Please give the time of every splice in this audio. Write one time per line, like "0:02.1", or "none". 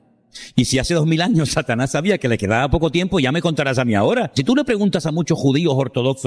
0:04.4